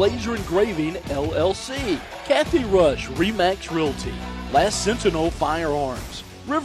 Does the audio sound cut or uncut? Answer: cut